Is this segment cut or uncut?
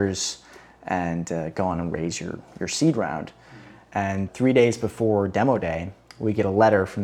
cut